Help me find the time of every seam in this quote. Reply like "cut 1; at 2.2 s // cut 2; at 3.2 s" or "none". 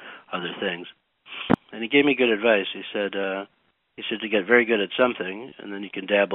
cut 1; at 1.5 s